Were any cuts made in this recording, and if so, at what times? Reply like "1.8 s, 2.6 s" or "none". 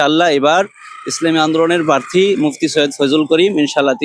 none